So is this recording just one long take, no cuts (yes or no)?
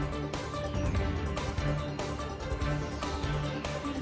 yes